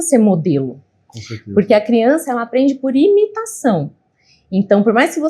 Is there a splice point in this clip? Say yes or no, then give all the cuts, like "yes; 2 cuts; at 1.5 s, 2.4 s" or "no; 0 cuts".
no; 0 cuts